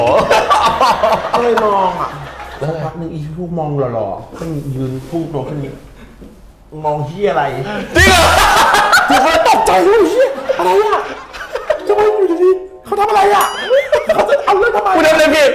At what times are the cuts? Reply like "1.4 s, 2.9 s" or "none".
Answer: none